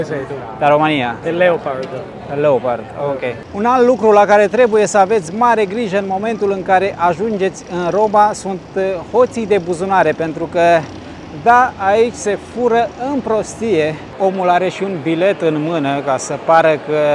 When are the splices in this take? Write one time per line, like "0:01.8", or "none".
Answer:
0:01.2
0:03.4
0:14.1